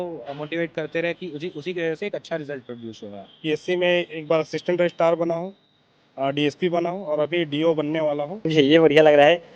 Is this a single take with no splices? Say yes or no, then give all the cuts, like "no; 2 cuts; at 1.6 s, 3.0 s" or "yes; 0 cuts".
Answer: no; 2 cuts; at 3.3 s, 8.4 s